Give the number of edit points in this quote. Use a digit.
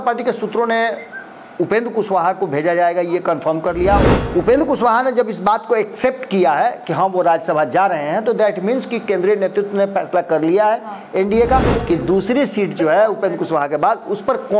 2